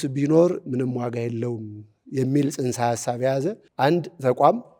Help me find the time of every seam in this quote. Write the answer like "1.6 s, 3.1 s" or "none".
3.6 s